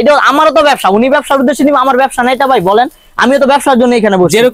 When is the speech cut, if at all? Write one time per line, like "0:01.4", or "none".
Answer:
none